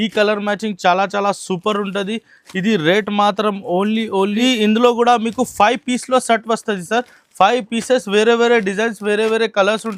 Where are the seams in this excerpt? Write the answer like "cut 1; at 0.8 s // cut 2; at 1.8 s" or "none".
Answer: cut 1; at 4.4 s

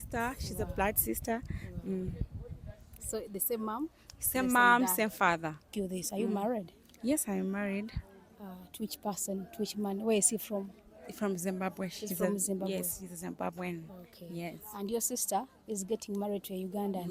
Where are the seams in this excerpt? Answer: cut 1; at 5.6 s

